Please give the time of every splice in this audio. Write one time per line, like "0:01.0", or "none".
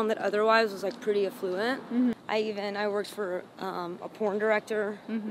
0:02.2